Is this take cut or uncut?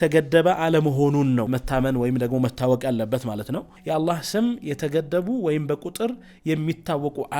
cut